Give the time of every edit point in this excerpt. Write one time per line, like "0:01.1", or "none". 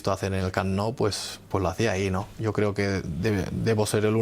0:02.3